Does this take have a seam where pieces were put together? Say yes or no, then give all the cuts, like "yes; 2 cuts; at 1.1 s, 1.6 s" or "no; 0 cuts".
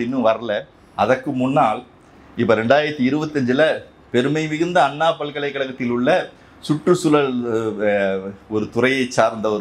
no; 0 cuts